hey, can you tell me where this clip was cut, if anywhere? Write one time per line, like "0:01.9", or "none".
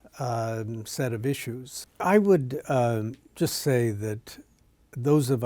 0:01.7